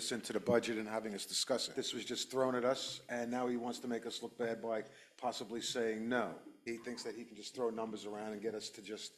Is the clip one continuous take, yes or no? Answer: no